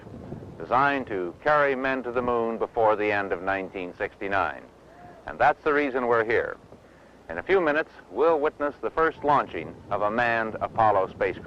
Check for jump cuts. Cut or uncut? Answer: cut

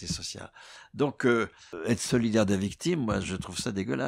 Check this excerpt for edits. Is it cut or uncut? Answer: cut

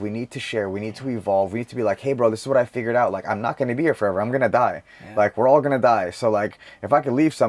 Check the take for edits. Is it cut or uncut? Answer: uncut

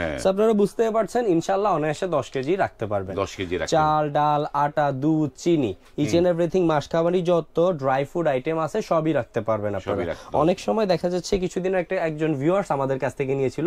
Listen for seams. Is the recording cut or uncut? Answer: uncut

